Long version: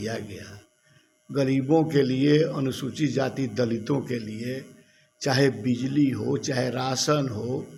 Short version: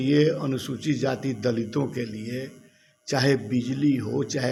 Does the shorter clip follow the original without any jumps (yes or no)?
yes